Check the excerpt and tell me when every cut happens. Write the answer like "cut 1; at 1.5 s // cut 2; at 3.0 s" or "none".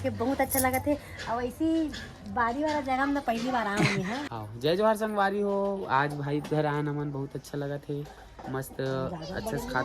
cut 1; at 4.3 s